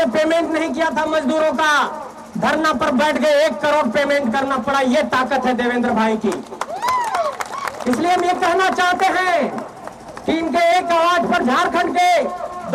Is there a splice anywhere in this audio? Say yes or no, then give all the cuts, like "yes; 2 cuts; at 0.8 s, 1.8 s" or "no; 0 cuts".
no; 0 cuts